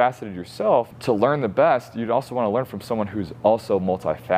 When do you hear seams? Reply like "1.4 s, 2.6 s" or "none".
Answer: 0.9 s